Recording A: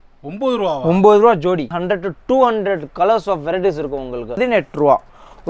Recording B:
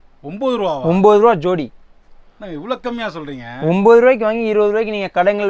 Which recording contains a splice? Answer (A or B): A